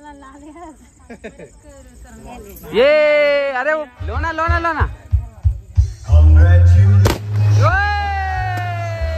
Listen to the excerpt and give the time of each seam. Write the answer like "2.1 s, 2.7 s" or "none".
4.0 s